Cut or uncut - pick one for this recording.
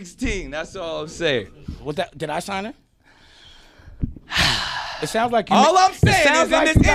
uncut